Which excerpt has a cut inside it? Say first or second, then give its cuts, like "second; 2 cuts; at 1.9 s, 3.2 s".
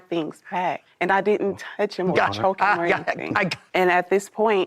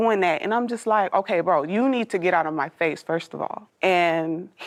first; 1 cut; at 3.6 s